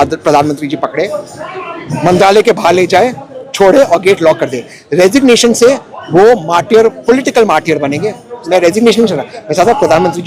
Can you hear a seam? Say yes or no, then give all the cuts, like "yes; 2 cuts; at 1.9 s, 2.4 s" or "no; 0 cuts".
no; 0 cuts